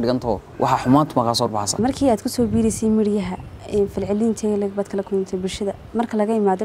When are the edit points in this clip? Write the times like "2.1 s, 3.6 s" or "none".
1.8 s